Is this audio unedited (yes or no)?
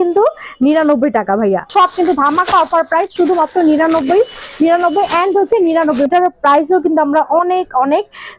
no